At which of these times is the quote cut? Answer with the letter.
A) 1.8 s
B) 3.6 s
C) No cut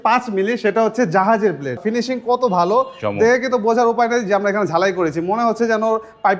A